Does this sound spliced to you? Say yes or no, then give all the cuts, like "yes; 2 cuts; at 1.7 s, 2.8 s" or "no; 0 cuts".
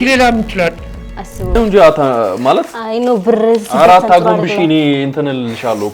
yes; 1 cut; at 1.6 s